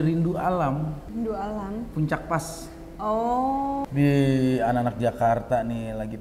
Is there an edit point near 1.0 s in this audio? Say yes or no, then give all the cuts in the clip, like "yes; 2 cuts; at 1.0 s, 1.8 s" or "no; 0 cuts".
yes; 2 cuts; at 1.0 s, 3.8 s